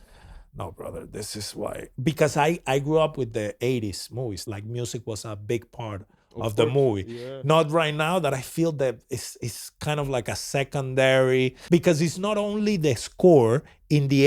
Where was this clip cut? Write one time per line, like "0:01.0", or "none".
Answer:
0:04.4
0:11.6

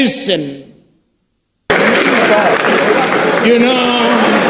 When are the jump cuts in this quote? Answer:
0:01.7

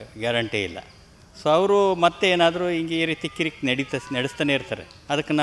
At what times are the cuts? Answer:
none

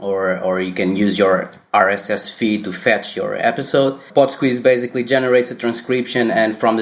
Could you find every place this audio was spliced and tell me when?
0:04.1

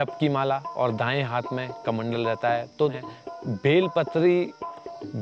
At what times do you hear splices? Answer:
0:02.9

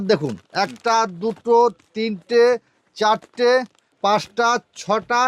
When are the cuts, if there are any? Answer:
0:03.8

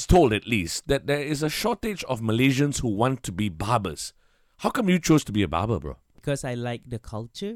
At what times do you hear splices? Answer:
0:06.1

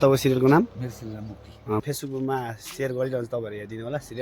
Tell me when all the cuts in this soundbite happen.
0:01.8

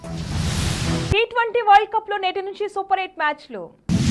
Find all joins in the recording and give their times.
none

